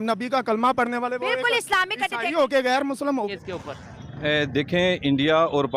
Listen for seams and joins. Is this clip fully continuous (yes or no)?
no